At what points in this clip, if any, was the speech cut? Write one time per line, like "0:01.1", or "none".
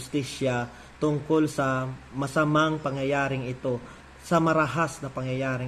0:04.0